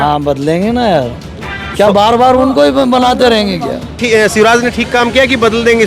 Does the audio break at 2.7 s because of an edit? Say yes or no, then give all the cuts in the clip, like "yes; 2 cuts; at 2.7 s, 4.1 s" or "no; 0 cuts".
no; 1 cut; at 4.0 s